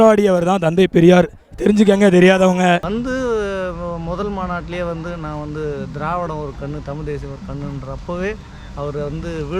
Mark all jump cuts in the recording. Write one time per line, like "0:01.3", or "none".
0:02.9